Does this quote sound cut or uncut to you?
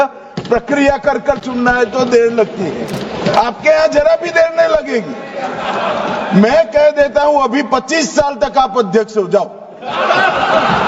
uncut